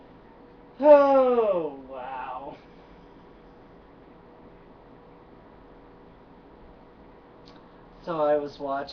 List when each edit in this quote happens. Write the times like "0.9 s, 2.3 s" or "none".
6.4 s